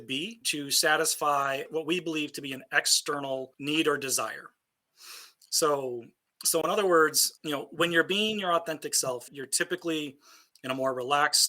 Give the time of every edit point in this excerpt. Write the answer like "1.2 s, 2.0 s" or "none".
1.7 s, 9.3 s

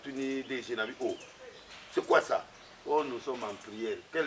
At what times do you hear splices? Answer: none

